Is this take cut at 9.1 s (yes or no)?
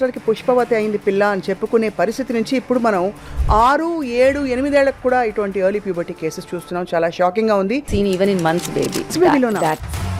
yes